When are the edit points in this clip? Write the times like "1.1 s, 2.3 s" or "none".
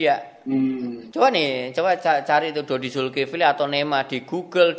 1.0 s